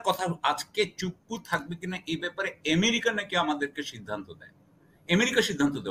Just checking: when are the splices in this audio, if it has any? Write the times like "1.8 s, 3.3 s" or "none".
none

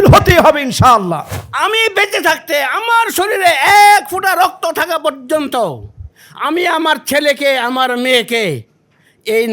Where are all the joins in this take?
1.4 s

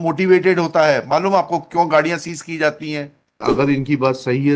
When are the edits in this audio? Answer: 3.5 s

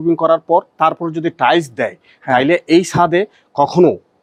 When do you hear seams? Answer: none

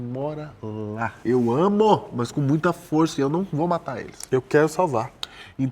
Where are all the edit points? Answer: 1.2 s

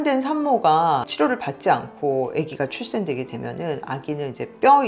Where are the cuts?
1.1 s

